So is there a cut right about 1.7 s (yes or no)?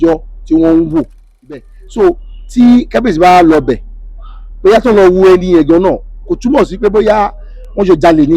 yes